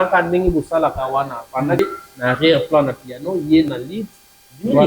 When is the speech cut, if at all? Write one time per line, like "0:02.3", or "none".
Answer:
0:01.8